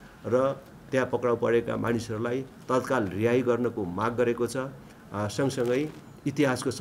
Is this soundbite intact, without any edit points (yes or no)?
yes